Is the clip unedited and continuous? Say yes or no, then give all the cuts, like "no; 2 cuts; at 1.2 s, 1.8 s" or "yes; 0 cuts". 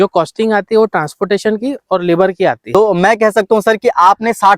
no; 1 cut; at 2.6 s